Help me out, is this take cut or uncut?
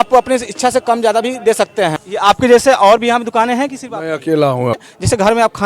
cut